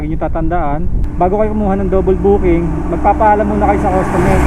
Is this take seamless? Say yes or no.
yes